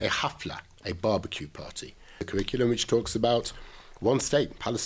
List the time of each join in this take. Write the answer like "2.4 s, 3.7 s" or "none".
2.2 s